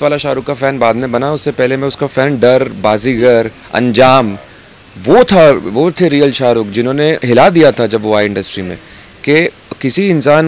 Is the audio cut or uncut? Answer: uncut